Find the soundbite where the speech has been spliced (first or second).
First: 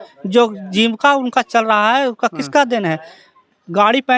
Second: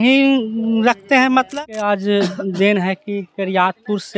second